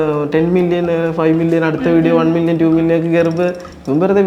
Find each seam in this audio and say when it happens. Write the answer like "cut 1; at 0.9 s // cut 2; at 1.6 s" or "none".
none